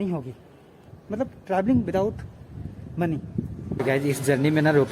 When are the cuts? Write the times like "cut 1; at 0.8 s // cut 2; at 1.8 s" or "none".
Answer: cut 1; at 3.8 s